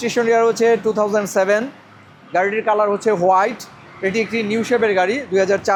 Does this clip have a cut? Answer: no; 0 cuts

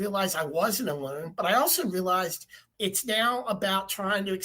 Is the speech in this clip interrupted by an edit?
yes; 1 cut; at 2.7 s

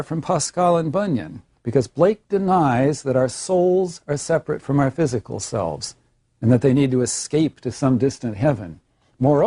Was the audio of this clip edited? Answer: no; 0 cuts

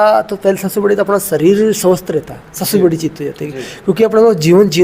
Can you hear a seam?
no; 0 cuts

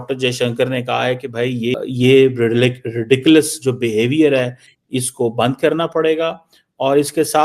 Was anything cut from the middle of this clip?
yes; 1 cut; at 1.7 s

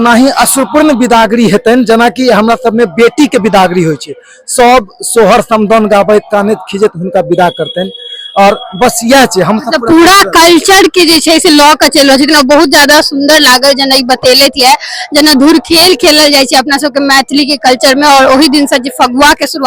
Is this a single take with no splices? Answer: yes; 0 cuts

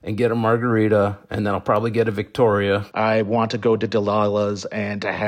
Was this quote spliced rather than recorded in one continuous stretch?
yes; 1 cut; at 2.9 s

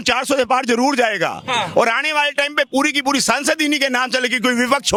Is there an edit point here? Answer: no; 0 cuts

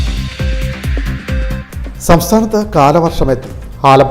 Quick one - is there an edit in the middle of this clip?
yes; 1 cut; at 1.6 s

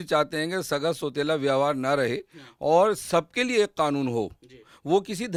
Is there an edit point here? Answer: no; 0 cuts

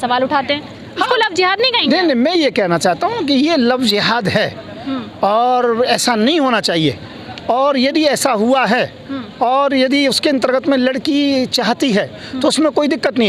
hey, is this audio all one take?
yes; 0 cuts

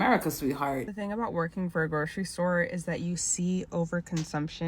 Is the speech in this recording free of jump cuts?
no; 1 cut; at 0.9 s

